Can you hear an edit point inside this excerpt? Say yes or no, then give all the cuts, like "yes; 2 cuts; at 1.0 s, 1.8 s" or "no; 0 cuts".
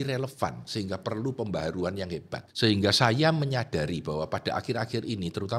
yes; 1 cut; at 2.4 s